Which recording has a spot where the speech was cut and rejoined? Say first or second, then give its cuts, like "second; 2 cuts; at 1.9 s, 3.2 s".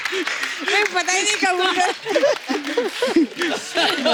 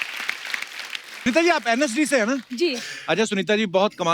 second; 1 cut; at 1.3 s